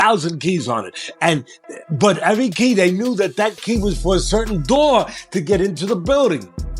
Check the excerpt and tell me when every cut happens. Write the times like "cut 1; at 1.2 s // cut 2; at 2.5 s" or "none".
none